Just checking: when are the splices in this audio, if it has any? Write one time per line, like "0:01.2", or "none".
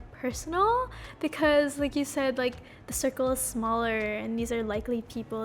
none